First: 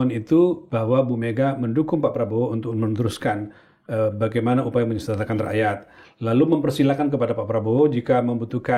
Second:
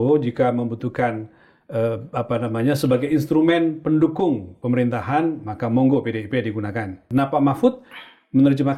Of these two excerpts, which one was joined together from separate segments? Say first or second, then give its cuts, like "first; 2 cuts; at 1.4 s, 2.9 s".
second; 1 cut; at 7.0 s